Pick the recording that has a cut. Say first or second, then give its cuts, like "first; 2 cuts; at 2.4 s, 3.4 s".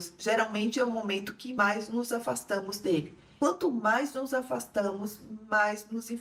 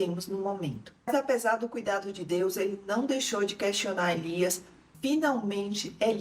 second; 2 cuts; at 1.1 s, 4.7 s